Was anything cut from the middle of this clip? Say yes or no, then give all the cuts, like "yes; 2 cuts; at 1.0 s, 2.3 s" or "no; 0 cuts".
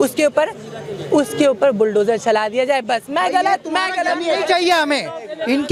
no; 0 cuts